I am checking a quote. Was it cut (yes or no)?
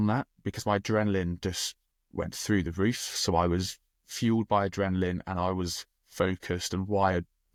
no